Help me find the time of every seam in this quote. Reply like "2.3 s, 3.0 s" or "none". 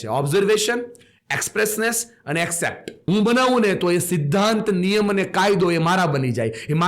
3.0 s